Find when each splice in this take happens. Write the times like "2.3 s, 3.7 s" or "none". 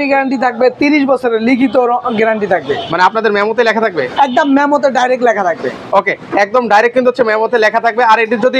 none